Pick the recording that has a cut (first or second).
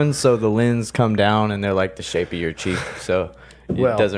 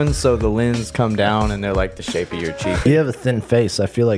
second